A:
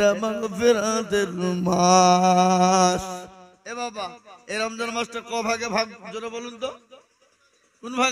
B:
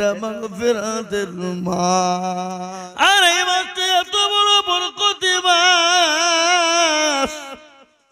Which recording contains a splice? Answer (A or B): B